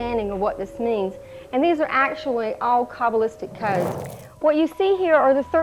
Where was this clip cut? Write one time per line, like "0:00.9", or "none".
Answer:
0:03.9